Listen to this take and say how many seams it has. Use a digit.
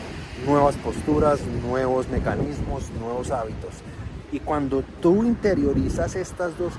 0